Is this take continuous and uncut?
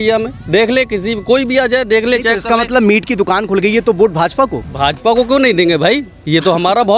yes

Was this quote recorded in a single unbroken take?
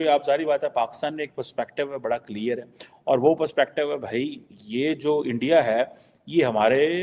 yes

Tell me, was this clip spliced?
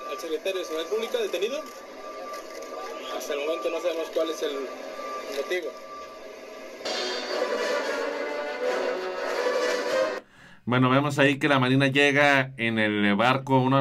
yes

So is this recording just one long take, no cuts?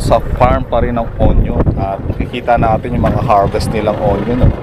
yes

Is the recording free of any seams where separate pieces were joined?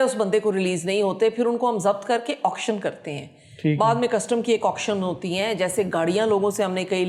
yes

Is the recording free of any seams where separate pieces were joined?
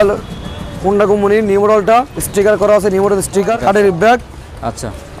no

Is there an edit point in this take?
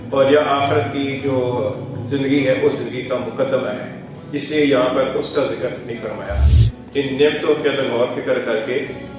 yes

